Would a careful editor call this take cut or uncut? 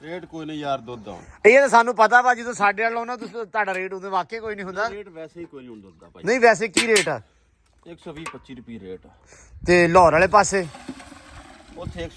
uncut